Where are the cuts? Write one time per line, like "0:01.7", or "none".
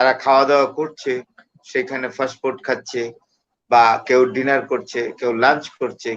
none